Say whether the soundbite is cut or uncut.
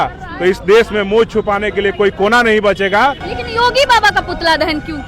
cut